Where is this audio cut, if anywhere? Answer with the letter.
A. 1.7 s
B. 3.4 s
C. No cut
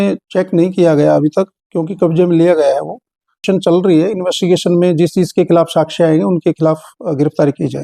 B